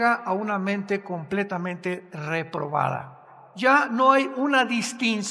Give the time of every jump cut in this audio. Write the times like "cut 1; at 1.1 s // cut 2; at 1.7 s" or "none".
cut 1; at 3.5 s